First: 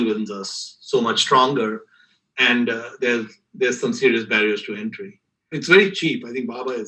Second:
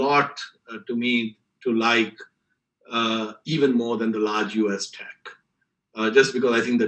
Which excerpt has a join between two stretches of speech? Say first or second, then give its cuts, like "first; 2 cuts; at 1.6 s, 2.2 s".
first; 1 cut; at 5.5 s